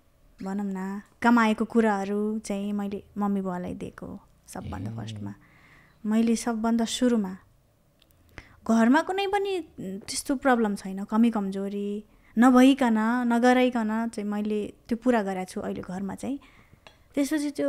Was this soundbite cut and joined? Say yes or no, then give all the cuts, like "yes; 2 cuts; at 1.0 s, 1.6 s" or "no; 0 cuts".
no; 0 cuts